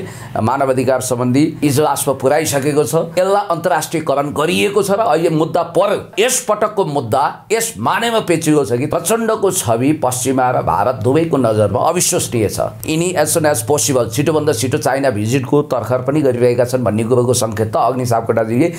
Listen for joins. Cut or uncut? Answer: cut